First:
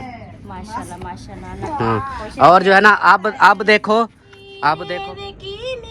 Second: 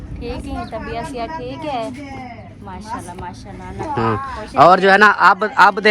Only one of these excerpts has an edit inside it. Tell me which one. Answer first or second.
first